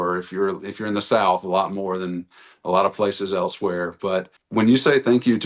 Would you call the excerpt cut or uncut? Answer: cut